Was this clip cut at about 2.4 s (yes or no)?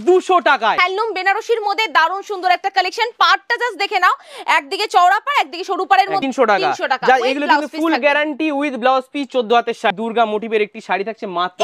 no